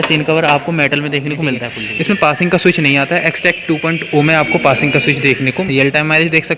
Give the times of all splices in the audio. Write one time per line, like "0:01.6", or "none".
0:01.7
0:05.5